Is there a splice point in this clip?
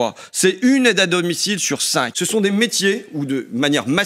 yes; 1 cut; at 2.2 s

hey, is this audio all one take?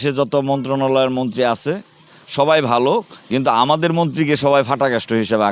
yes; 0 cuts

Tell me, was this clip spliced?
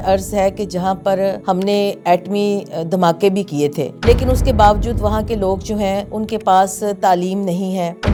no; 0 cuts

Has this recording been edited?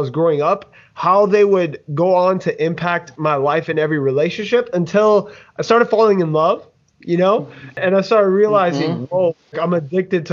yes; 2 cuts; at 7.8 s, 9.5 s

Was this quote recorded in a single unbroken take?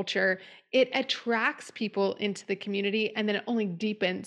yes; 0 cuts

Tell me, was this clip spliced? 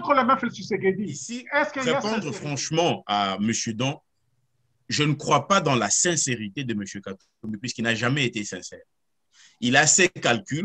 yes; 1 cut; at 2.0 s

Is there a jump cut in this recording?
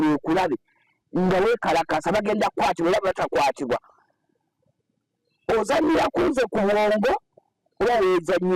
no; 0 cuts

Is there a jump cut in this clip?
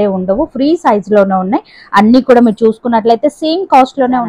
no; 0 cuts

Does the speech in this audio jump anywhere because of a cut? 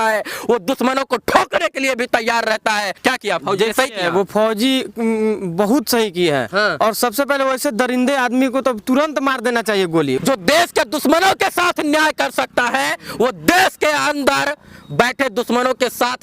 yes; 2 cuts; at 3.0 s, 10.2 s

